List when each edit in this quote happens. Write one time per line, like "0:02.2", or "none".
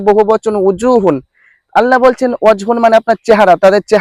none